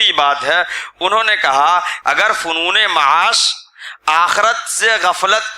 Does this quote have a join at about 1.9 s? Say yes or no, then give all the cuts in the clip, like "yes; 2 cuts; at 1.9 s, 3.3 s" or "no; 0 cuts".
yes; 1 cut; at 1.9 s